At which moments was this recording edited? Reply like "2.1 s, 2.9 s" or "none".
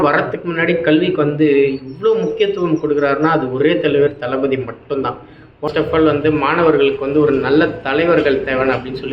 5.7 s